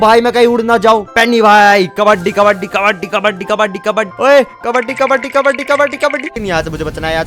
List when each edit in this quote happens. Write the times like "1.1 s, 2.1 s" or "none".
1.1 s, 4.1 s, 6.3 s